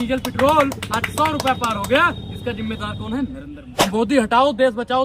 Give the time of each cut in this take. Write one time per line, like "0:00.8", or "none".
0:03.8

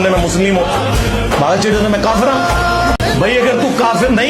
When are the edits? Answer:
0:03.0

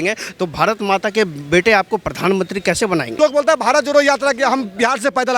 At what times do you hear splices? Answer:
0:03.2

